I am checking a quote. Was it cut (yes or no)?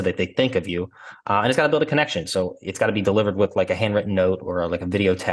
no